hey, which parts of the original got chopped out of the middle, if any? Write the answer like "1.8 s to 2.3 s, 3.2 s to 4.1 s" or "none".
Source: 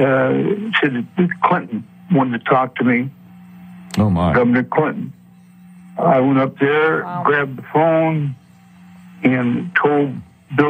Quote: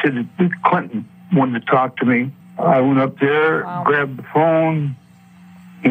3.2 s to 5.8 s